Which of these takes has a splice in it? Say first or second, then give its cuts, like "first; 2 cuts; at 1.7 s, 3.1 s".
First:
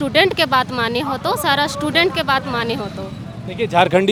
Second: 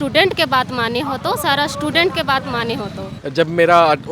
second; 1 cut; at 3.1 s